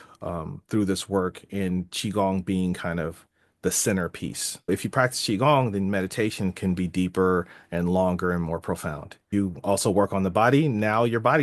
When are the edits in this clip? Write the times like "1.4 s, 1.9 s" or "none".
4.7 s, 9.1 s